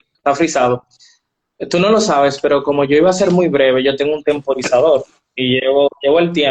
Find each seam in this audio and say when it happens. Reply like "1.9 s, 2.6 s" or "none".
3.2 s